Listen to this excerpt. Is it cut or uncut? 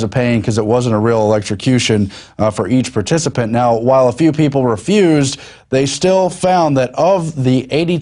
uncut